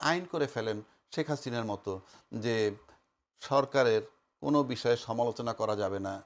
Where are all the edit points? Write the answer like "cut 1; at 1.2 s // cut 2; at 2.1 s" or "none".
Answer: none